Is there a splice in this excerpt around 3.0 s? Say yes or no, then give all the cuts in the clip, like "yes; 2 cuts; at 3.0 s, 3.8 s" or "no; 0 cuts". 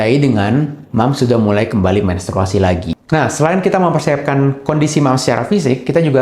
yes; 1 cut; at 3.0 s